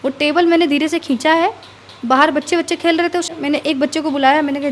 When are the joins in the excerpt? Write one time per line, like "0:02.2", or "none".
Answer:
0:03.3